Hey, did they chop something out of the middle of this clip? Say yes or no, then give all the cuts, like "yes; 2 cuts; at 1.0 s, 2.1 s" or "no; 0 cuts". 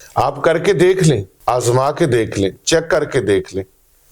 yes; 1 cut; at 1.3 s